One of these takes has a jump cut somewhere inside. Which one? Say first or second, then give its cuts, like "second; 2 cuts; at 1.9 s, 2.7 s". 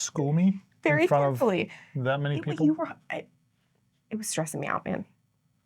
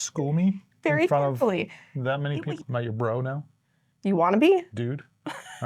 second; 1 cut; at 2.5 s